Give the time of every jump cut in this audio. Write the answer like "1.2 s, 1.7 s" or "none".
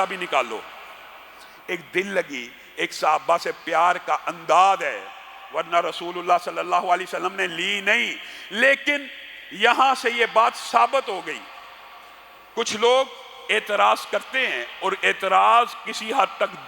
none